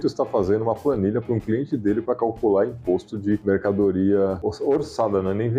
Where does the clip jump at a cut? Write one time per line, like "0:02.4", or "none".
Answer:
0:03.4
0:04.4